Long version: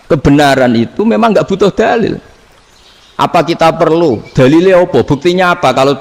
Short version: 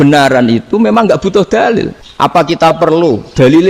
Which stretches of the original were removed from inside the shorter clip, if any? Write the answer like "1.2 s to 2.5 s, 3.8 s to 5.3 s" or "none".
2.3 s to 3.0 s